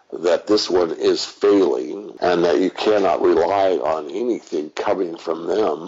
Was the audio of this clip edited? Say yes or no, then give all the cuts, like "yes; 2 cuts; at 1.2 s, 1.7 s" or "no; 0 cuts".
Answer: yes; 1 cut; at 2.0 s